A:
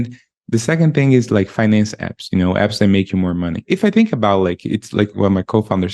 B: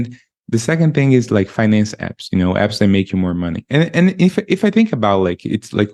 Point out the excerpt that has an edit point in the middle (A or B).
A